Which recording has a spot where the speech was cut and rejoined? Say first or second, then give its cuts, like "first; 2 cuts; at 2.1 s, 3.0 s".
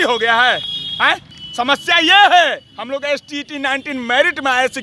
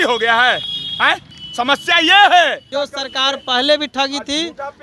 second; 1 cut; at 2.6 s